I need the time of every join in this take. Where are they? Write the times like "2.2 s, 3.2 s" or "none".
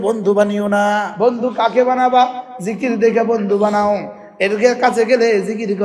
1.1 s